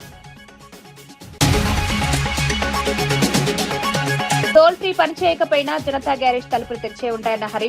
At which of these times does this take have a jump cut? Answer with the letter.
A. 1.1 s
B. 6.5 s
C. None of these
A